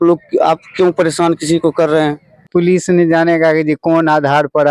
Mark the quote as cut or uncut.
cut